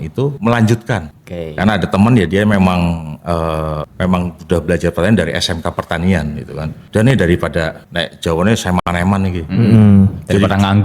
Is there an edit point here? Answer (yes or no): no